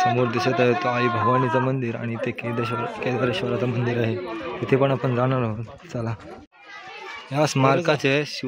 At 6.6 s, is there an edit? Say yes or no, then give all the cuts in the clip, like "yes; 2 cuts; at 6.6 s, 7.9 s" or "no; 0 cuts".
yes; 1 cut; at 6.6 s